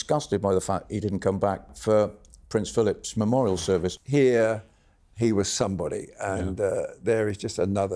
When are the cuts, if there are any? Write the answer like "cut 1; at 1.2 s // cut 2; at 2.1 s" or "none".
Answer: cut 1; at 1.7 s // cut 2; at 4.0 s

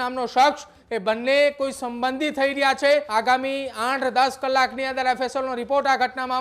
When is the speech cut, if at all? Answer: cut 1; at 3.1 s

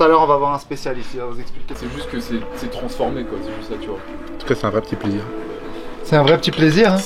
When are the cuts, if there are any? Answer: cut 1; at 1.6 s

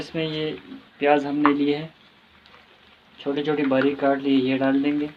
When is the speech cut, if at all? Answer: none

